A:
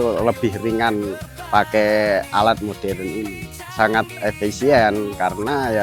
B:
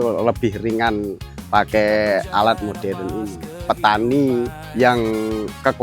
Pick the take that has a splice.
B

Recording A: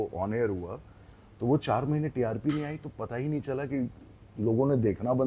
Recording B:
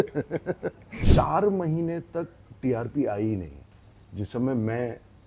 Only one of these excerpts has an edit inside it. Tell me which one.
B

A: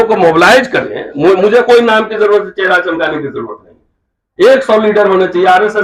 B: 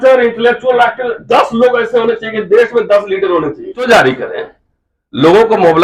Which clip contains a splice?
B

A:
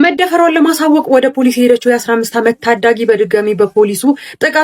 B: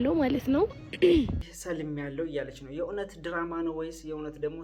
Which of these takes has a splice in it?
B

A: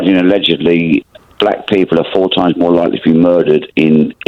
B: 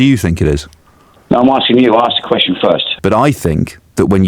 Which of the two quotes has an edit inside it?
B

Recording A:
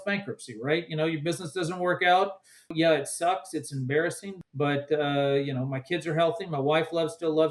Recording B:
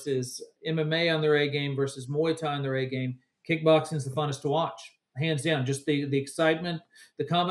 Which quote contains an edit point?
A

